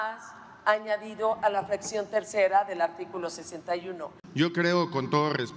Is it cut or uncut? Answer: cut